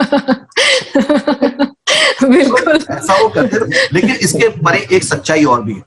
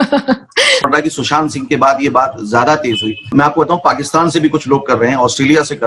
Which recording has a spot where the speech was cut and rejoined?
second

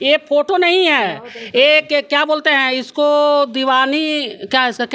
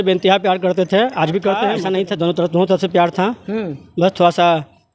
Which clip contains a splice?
second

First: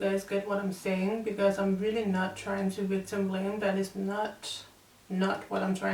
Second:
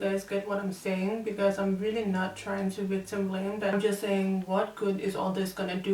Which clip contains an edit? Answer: second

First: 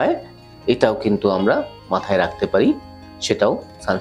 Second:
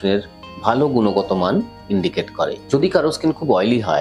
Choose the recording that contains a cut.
second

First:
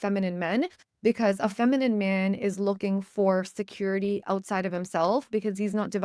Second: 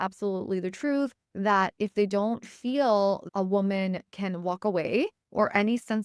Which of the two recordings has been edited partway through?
second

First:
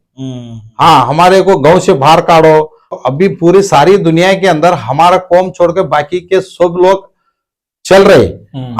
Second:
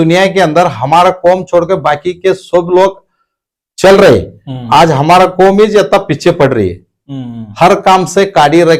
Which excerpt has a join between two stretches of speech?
first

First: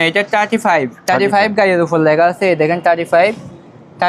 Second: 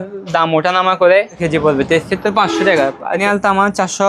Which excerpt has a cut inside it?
second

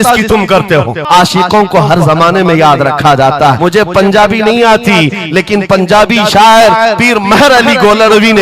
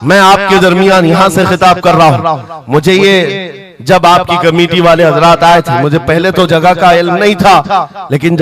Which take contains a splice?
first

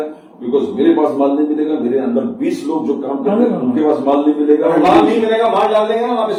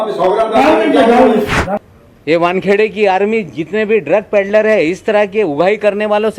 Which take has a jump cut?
second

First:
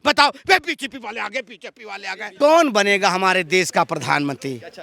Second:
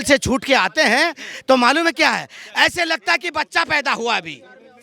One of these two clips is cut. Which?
first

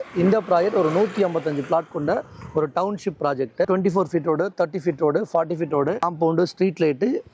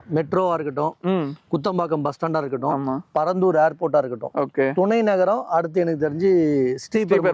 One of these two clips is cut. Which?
first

